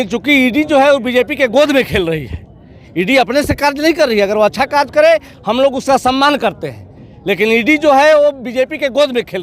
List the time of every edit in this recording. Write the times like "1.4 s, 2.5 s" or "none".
none